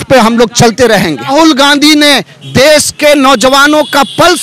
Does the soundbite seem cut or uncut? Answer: cut